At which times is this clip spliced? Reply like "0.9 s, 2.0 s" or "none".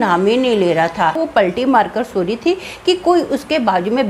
1.2 s